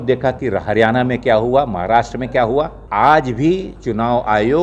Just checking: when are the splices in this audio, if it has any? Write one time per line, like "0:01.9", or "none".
0:02.8